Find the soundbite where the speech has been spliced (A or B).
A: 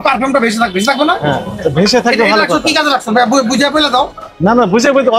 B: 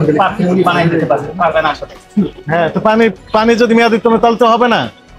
B